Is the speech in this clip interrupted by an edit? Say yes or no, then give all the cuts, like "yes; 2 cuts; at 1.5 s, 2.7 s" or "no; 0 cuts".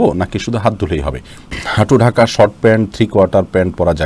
yes; 1 cut; at 1.3 s